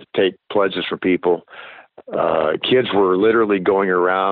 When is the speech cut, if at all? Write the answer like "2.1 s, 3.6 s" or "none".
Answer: none